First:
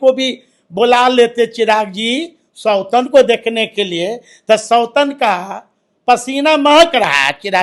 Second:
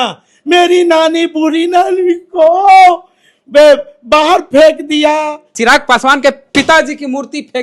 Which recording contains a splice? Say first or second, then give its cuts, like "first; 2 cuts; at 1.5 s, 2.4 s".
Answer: second; 1 cut; at 5.4 s